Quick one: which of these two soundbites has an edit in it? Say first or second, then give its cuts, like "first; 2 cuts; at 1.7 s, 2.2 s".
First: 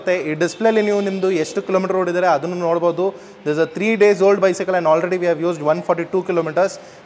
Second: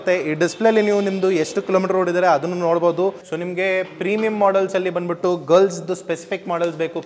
second; 1 cut; at 3.3 s